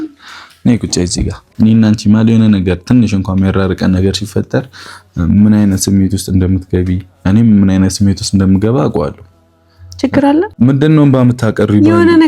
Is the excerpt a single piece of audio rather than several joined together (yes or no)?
no